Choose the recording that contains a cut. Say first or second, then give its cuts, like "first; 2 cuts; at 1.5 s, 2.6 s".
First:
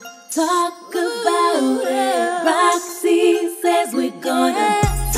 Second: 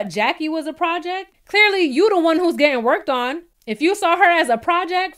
second; 1 cut; at 1.3 s